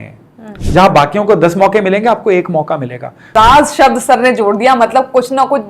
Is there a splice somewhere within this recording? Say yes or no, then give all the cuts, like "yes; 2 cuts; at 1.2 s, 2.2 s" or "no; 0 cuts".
yes; 1 cut; at 3.3 s